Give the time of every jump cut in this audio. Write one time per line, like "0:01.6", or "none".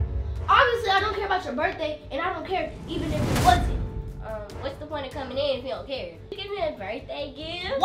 0:06.3